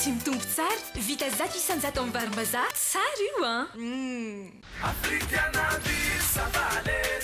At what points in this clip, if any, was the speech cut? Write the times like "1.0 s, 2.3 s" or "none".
4.6 s